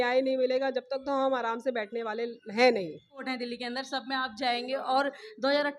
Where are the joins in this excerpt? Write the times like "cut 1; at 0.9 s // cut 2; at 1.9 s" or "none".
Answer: cut 1; at 3.2 s